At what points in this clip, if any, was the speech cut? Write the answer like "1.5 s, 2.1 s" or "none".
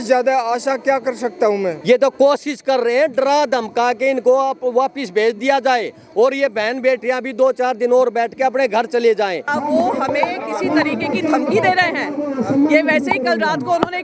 1.8 s, 9.5 s